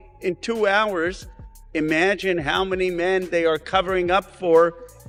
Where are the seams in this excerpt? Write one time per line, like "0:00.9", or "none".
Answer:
none

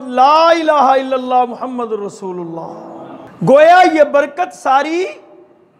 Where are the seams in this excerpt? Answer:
0:03.2

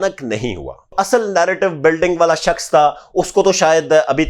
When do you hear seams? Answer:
0:00.9

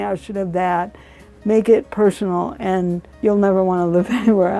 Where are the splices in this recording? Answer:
0:03.1

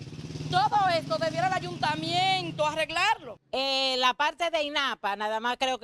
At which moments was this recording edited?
0:03.3

